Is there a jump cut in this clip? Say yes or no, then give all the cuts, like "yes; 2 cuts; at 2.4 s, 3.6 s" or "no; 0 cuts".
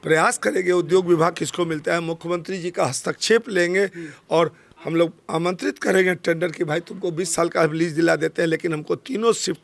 no; 0 cuts